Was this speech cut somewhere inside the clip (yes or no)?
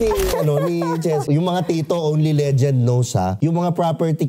yes